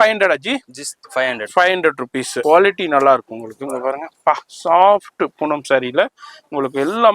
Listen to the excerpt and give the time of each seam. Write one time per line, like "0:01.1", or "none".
0:02.3